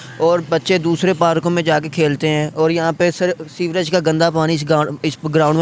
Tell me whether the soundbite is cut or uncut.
uncut